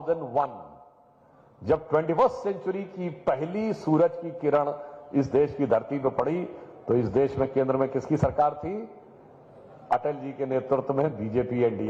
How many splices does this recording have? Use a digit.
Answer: 0